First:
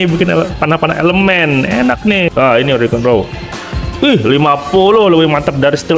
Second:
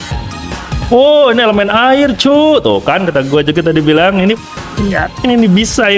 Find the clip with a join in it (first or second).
first